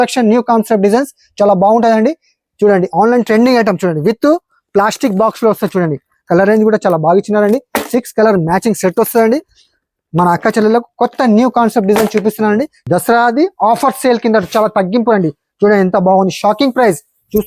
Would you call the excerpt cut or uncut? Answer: cut